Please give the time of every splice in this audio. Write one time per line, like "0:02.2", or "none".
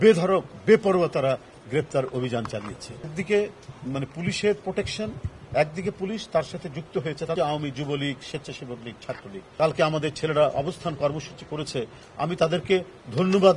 0:03.2
0:07.4
0:09.4